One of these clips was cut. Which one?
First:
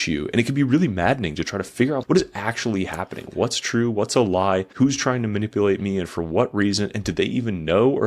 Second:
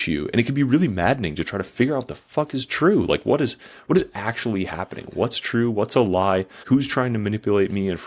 first; 2 cuts; at 2.0 s, 4.7 s

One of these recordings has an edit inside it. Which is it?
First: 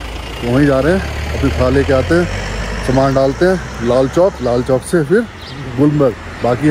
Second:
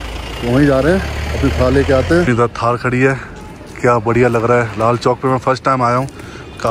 second; 1 cut; at 2.3 s

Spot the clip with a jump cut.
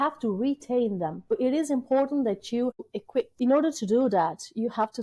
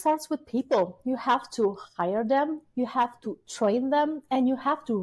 first; 2 cuts; at 1.3 s, 2.8 s

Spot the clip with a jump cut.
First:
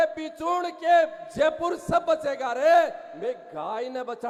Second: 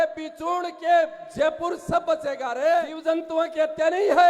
second; 1 cut; at 2.9 s

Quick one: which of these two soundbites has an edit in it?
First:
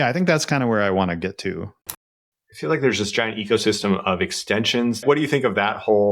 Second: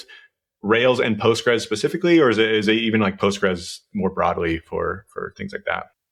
first; 2 cuts; at 1.8 s, 5.0 s

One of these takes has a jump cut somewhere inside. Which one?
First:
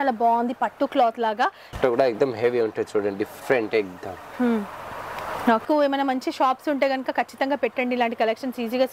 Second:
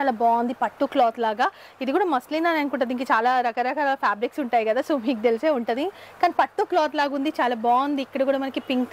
first; 2 cuts; at 1.8 s, 5.6 s

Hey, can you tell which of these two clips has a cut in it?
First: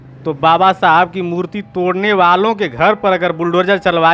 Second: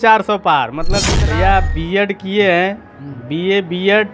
second; 1 cut; at 1.2 s

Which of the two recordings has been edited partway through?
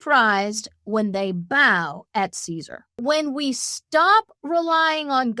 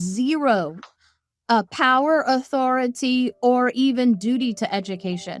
first; 1 cut; at 3.0 s

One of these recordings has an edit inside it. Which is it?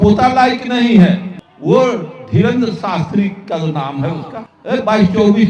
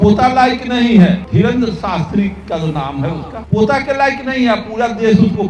second; 2 cuts; at 1.2 s, 3.3 s

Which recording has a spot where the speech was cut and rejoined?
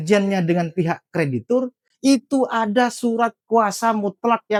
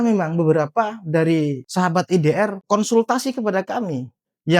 second; 2 cuts; at 1.6 s, 2.6 s

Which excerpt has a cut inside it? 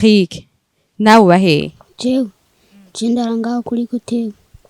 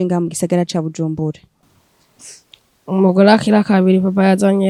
first; 1 cut; at 1.8 s

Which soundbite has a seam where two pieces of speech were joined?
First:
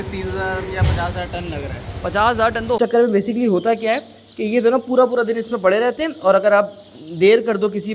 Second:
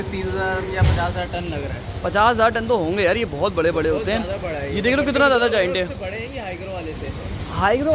first; 1 cut; at 2.8 s

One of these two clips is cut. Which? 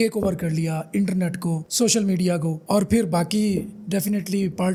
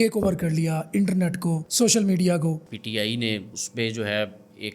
second; 1 cut; at 2.6 s

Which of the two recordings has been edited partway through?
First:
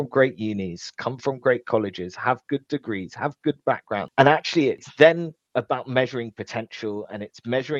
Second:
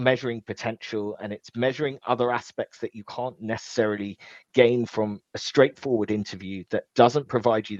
first; 2 cuts; at 4.1 s, 4.9 s

